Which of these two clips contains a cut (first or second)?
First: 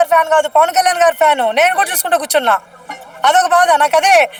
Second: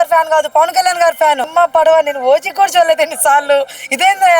second